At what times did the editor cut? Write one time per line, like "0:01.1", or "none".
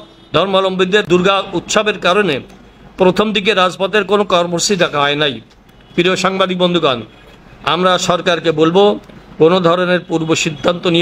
0:01.1

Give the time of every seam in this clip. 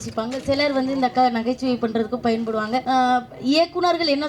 0:02.8

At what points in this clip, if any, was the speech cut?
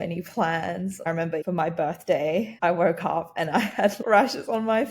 0:01.0
0:02.5
0:04.0

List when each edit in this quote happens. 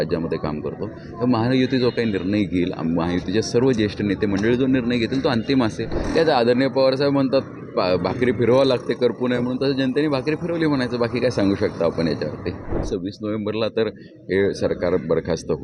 0:06.0
0:12.8

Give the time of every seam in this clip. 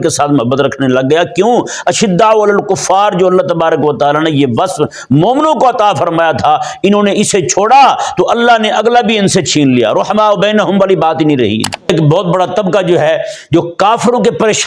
0:11.9

